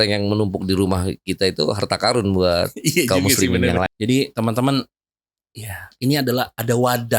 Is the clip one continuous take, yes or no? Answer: no